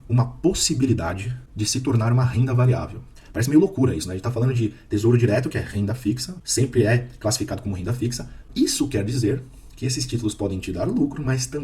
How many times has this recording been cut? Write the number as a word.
one